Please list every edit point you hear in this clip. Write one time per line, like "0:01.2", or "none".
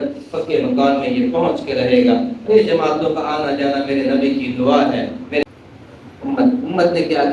0:05.4